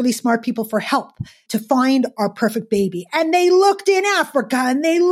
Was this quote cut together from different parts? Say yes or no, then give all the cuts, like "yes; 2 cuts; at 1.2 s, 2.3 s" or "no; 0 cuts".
yes; 1 cut; at 1.4 s